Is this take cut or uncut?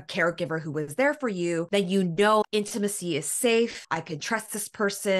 cut